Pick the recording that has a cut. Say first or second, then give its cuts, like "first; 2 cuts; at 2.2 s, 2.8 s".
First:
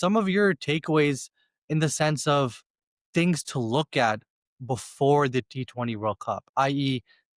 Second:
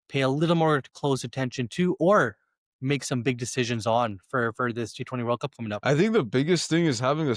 second; 1 cut; at 5.8 s